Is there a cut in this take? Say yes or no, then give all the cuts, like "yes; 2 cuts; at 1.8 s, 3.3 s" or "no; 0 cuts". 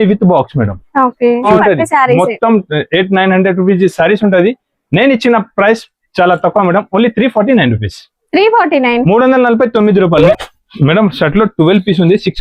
yes; 2 cuts; at 1.5 s, 10.2 s